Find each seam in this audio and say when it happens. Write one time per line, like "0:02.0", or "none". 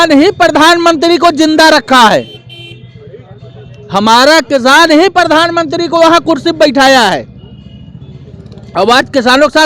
none

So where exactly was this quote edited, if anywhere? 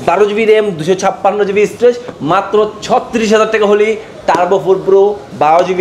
0:02.1

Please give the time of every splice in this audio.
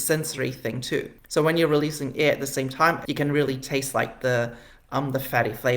0:03.0

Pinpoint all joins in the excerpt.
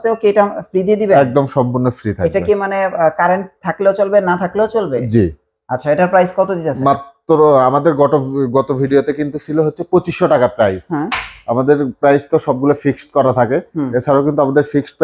none

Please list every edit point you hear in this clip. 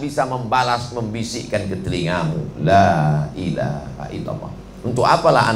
none

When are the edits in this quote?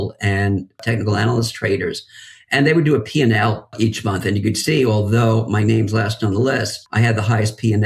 0:00.8
0:03.7
0:06.8

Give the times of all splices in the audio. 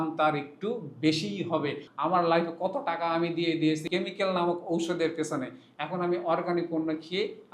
0:01.8
0:03.9

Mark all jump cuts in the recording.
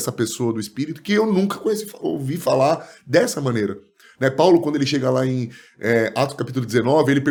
none

